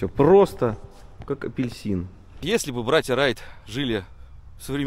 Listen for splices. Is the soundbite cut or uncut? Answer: cut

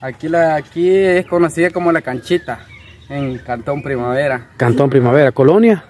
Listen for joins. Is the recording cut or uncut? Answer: uncut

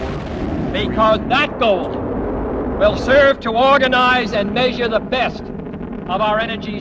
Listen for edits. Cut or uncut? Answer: uncut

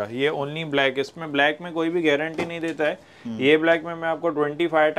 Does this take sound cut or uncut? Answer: uncut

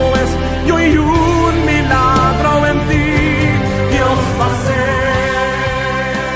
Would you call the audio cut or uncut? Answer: uncut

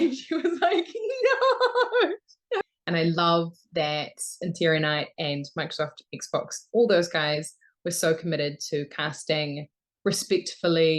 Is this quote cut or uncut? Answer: cut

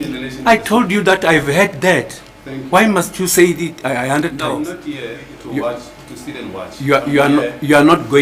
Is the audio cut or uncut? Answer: cut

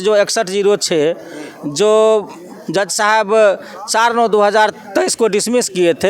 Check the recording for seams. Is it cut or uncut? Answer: uncut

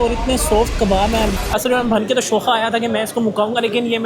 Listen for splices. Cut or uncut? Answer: cut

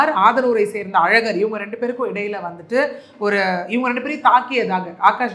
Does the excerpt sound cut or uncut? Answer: uncut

